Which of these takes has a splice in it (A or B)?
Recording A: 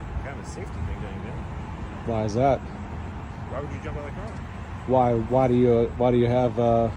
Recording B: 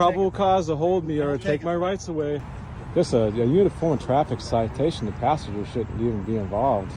B